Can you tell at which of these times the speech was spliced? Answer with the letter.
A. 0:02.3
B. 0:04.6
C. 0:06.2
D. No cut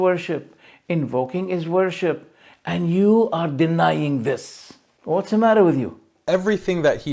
C